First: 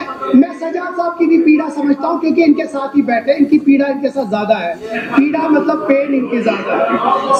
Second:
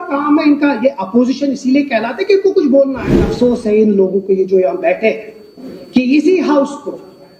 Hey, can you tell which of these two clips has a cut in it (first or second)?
second